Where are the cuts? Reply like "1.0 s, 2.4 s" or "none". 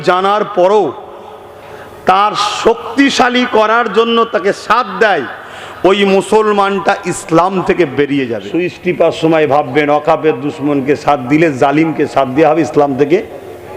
8.4 s